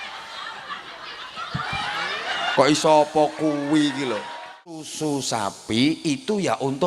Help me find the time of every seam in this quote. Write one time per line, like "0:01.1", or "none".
0:04.9